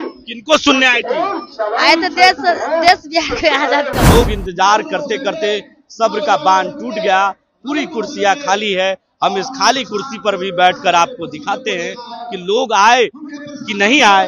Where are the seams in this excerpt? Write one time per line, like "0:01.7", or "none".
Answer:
0:04.0